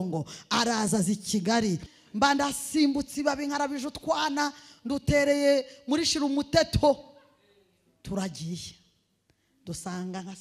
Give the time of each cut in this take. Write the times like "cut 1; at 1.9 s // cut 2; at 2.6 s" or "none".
cut 1; at 1.9 s